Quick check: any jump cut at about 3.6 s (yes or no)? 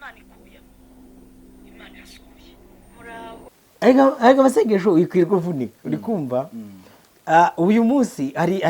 yes